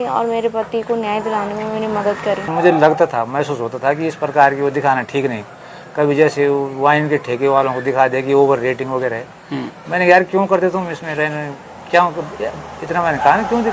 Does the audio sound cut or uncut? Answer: cut